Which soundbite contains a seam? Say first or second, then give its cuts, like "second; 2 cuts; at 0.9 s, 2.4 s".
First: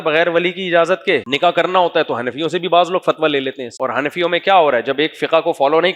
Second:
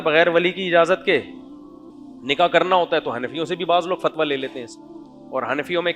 first; 2 cuts; at 1.3 s, 3.6 s